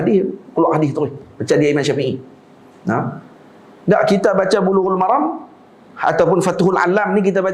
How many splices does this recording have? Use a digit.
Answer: 0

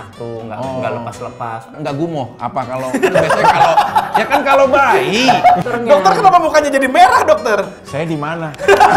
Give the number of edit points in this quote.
2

